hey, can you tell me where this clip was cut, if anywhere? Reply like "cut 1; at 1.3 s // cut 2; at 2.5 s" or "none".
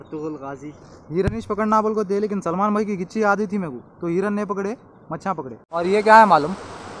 cut 1; at 5.8 s